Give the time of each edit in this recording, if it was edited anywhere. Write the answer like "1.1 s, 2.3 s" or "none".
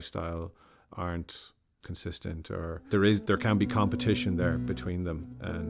none